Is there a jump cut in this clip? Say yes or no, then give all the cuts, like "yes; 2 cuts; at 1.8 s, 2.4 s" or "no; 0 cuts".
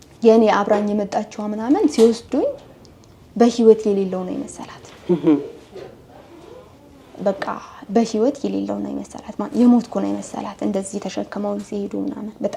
no; 0 cuts